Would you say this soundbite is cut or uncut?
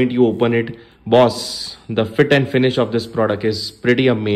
uncut